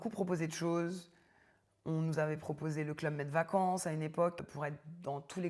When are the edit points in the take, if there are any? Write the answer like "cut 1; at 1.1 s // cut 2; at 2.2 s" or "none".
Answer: cut 1; at 4.5 s